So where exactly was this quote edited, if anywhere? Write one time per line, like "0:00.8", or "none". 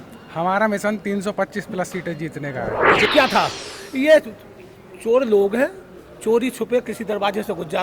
0:03.1